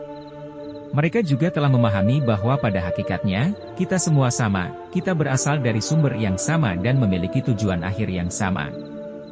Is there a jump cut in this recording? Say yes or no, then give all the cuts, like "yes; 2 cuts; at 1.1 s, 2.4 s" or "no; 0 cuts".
no; 0 cuts